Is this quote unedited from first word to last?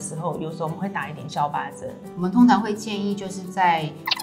no; 1 cut; at 2.1 s

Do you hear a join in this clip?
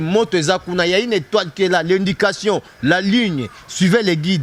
no; 0 cuts

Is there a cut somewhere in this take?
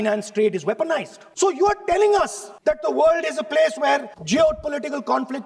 yes; 3 cuts; at 1.2 s, 2.5 s, 4.1 s

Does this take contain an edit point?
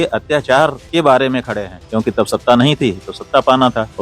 yes; 1 cut; at 1.8 s

